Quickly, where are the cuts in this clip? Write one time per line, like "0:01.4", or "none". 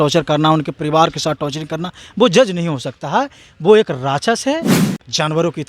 0:04.8